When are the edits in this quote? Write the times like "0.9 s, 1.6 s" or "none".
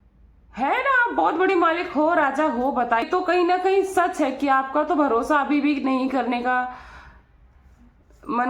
3.0 s